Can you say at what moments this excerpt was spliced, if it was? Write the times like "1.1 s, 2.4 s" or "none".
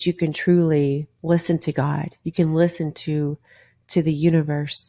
1.1 s

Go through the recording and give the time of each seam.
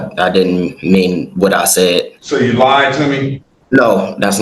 2.2 s

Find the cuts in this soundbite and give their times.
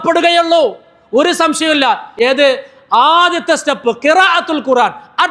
none

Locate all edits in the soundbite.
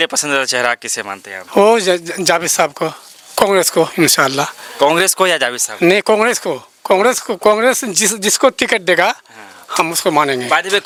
none

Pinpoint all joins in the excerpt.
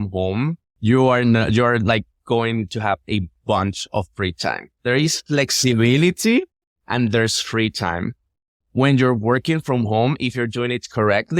none

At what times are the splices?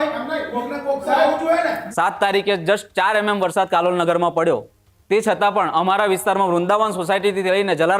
1.8 s

